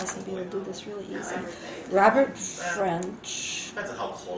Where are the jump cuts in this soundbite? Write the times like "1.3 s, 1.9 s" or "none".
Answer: 2.8 s